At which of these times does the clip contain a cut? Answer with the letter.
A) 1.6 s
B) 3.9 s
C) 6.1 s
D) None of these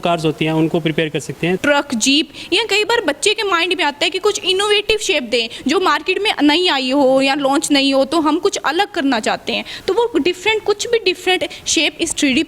A